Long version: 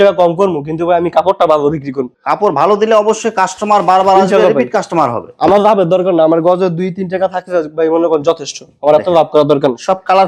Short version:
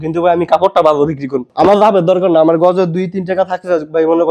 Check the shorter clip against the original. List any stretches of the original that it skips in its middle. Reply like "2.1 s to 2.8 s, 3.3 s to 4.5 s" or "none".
2.1 s to 5.3 s